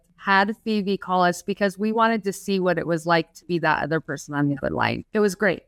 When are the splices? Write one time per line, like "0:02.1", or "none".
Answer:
none